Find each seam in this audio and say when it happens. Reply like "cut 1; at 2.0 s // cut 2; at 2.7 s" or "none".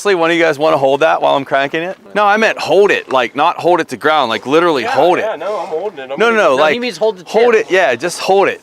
cut 1; at 2.0 s